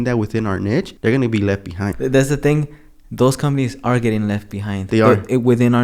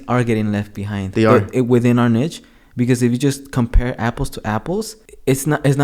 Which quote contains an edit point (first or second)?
first